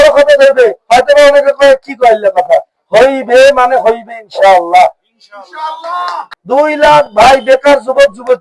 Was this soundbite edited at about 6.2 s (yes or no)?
yes